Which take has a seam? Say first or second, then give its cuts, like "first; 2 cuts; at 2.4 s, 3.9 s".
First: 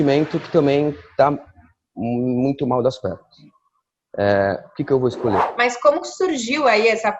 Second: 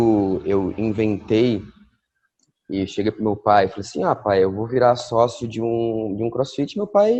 first; 1 cut; at 5.5 s